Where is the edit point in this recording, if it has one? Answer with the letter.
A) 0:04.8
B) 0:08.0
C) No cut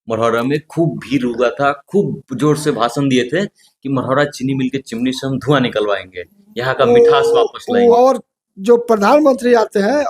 B